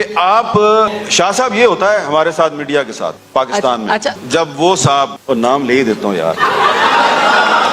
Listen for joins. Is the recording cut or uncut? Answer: cut